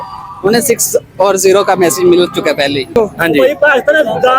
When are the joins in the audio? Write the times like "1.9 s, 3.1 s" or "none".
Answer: 2.9 s